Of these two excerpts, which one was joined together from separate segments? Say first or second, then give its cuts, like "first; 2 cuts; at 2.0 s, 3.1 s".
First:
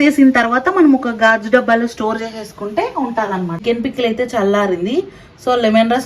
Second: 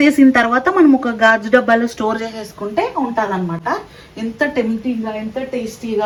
first; 1 cut; at 3.6 s